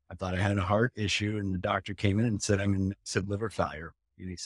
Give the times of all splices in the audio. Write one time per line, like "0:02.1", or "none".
none